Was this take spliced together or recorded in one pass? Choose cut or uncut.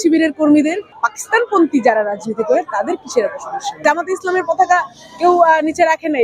cut